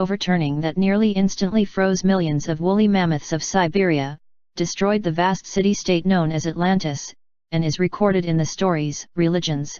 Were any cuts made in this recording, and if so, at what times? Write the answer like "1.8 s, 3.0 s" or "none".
none